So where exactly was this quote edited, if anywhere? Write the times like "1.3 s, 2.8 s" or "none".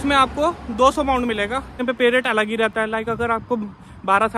1.8 s